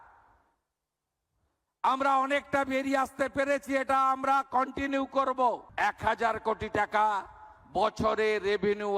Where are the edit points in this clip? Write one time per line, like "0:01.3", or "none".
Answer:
0:05.7